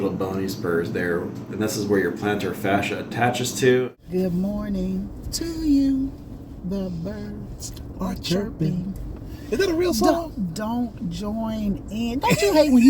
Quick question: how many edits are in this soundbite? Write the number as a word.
one